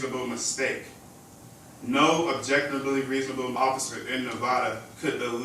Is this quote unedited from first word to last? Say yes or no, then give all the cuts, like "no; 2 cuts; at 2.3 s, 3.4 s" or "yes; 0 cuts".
no; 1 cut; at 3.6 s